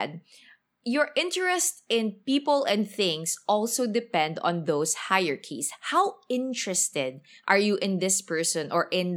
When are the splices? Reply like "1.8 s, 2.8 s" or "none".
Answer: 2.2 s